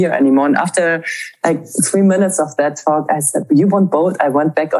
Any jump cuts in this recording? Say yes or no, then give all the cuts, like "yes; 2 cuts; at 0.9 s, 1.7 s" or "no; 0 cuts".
yes; 1 cut; at 3.4 s